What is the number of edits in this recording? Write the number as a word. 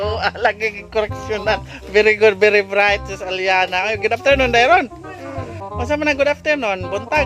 zero